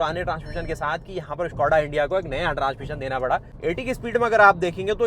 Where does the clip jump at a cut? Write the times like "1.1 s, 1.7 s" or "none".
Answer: 3.5 s